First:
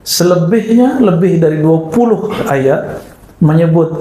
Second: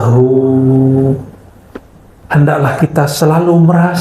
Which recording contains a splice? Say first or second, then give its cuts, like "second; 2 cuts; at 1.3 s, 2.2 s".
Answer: second; 1 cut; at 2.1 s